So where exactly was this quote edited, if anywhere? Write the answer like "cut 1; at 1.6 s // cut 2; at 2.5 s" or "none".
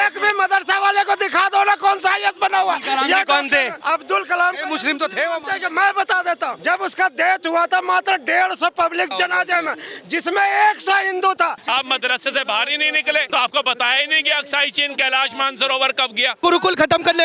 cut 1; at 3.8 s // cut 2; at 6.6 s // cut 3; at 9.1 s // cut 4; at 11.6 s // cut 5; at 13.3 s // cut 6; at 16.4 s

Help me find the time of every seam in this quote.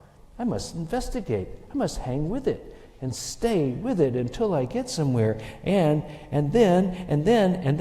none

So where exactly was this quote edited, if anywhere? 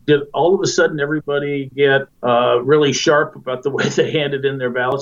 none

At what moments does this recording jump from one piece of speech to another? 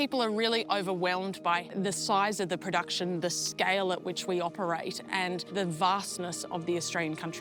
none

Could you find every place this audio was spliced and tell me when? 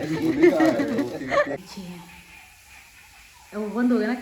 cut 1; at 1.6 s

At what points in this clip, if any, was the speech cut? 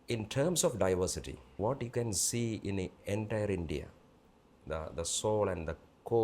cut 1; at 1.5 s

